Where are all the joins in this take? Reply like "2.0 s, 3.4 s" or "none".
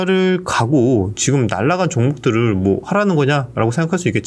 none